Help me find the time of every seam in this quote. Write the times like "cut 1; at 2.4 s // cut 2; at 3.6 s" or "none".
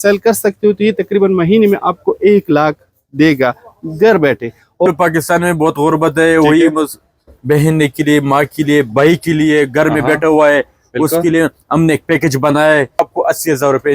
cut 1; at 4.9 s // cut 2; at 13.0 s